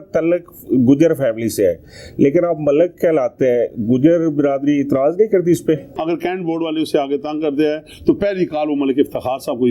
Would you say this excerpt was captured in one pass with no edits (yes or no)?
no